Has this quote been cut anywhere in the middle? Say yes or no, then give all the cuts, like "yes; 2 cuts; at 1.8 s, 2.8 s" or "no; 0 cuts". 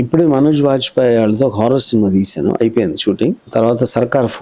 yes; 1 cut; at 3.4 s